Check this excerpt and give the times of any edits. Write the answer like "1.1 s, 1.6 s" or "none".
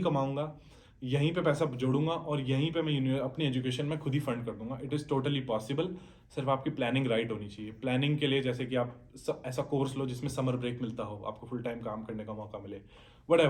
none

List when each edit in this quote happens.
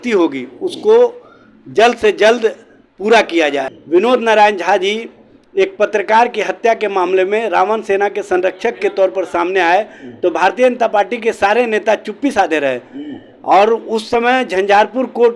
3.7 s

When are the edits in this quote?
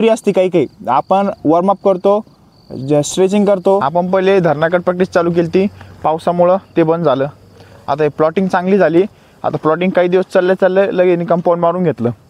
3.9 s

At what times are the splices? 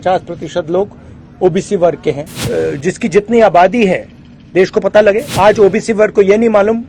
2.3 s, 5.3 s

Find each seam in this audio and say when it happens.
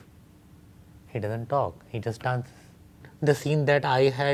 3.1 s

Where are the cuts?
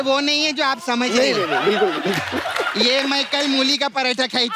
none

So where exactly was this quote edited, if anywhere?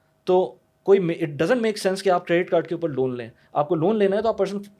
none

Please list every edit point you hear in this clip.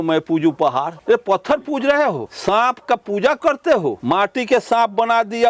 0.9 s, 2.3 s, 4.0 s

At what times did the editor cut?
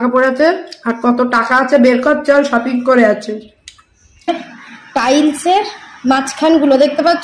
4.3 s

